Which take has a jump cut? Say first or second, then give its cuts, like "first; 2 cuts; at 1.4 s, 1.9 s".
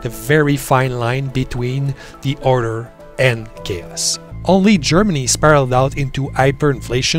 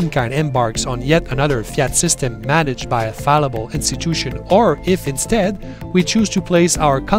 first; 1 cut; at 4.3 s